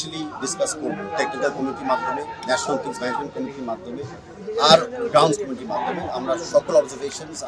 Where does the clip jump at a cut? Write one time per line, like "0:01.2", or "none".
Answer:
none